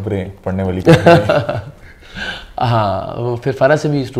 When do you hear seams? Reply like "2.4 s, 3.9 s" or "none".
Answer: none